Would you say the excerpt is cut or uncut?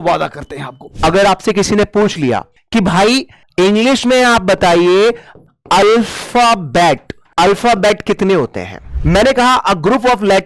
cut